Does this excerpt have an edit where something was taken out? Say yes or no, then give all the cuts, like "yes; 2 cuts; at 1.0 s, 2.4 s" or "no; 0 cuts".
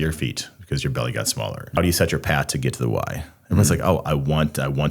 yes; 1 cut; at 1.8 s